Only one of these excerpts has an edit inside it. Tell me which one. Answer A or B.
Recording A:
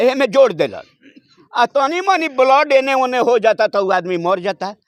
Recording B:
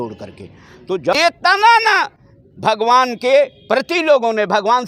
B